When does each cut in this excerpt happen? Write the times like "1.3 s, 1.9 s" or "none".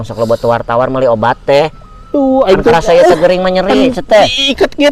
none